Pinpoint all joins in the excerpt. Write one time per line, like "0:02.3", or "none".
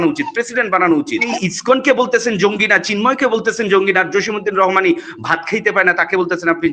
0:01.3